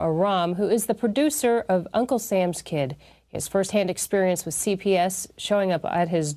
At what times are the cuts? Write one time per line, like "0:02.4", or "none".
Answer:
0:01.0